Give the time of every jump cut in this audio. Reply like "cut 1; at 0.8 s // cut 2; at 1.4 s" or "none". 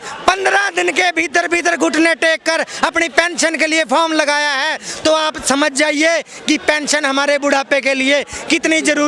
none